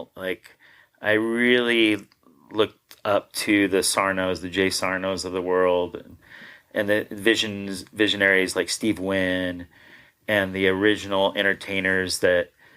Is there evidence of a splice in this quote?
no; 0 cuts

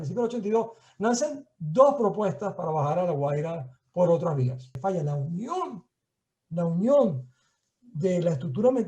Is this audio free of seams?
no; 1 cut; at 4.7 s

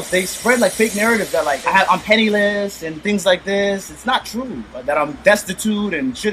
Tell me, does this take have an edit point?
yes; 1 cut; at 1.6 s

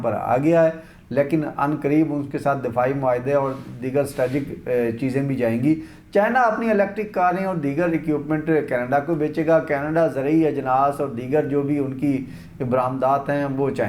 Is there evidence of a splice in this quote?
no; 0 cuts

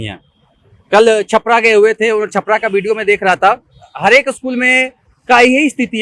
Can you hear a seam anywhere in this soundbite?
no; 0 cuts

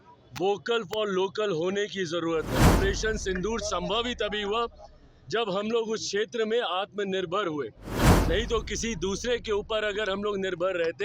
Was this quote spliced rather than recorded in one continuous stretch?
yes; 1 cut; at 2.8 s

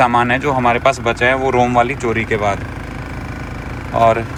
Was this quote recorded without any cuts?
yes; 0 cuts

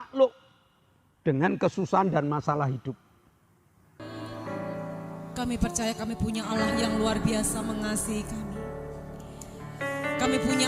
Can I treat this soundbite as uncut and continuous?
no; 1 cut; at 4.1 s

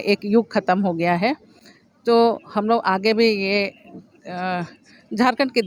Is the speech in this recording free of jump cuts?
yes; 0 cuts

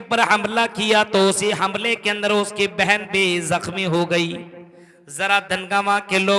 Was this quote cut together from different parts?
no; 0 cuts

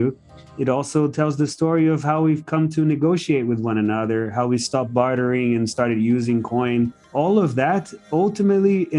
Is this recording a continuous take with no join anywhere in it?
no; 1 cut; at 7.0 s

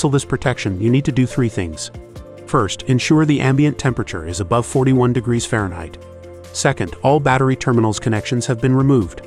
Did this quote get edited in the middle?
no; 0 cuts

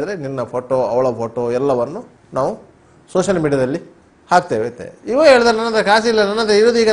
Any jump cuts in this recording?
no; 0 cuts

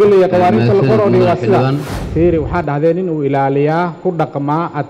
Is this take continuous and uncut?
no; 1 cut; at 1.9 s

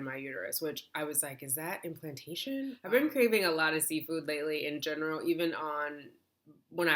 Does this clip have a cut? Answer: yes; 1 cut; at 2.8 s

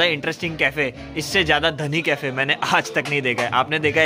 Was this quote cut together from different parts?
no; 0 cuts

